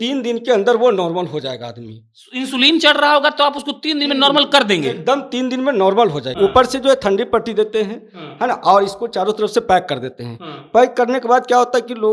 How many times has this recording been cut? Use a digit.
1